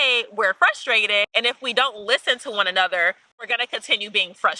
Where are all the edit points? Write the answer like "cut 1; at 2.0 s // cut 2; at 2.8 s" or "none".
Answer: none